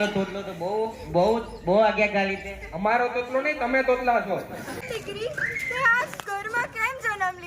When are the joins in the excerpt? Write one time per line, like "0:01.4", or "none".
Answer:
0:04.7